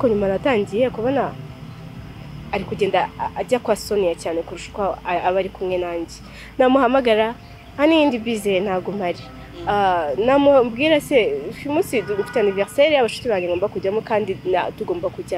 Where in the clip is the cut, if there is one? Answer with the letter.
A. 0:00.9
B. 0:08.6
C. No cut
C